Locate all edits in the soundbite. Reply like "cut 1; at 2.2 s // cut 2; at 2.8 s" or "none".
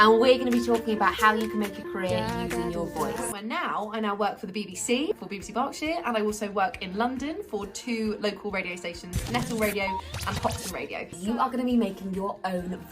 cut 1; at 3.3 s // cut 2; at 5.1 s // cut 3; at 11.1 s